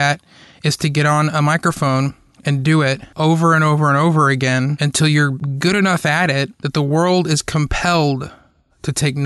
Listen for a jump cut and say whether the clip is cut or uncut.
cut